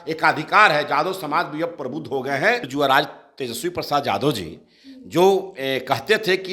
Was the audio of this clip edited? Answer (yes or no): yes